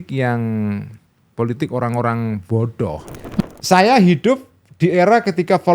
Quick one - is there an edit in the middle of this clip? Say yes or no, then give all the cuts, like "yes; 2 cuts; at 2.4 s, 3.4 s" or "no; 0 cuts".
yes; 1 cut; at 3.4 s